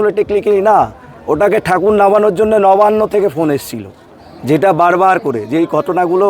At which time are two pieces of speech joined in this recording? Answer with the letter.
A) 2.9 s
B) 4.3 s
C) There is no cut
C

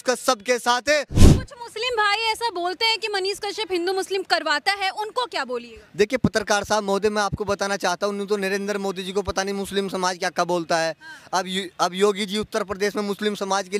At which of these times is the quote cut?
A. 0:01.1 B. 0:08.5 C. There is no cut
A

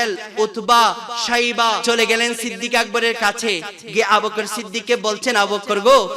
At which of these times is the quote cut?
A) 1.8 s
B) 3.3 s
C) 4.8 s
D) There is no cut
A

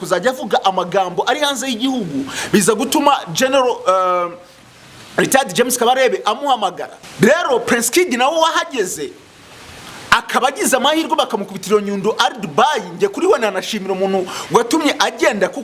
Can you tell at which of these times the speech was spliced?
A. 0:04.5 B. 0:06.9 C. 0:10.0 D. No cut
B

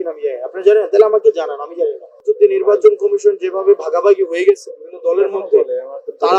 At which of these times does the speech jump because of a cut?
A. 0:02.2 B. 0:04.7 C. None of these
A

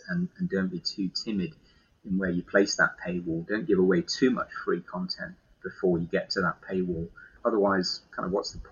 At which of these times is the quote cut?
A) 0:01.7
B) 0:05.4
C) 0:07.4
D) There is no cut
C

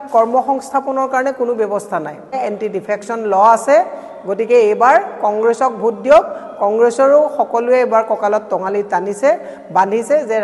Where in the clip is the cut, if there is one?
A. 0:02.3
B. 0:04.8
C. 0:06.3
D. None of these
A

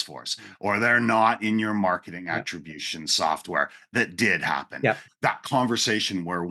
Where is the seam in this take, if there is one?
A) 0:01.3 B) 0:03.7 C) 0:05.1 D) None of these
C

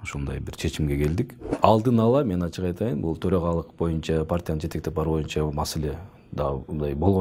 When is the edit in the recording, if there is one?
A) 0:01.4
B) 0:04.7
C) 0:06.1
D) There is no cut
A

